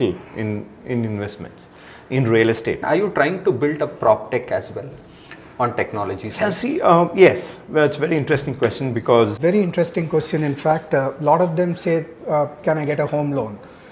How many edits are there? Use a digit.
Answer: 2